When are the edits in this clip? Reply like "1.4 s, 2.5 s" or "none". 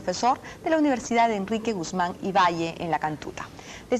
3.0 s